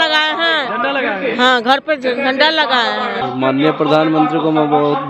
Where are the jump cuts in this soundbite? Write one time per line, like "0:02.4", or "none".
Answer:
0:03.2